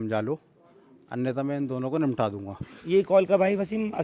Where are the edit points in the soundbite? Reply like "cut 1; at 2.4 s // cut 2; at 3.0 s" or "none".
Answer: none